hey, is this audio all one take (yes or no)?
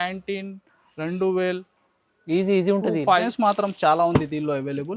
no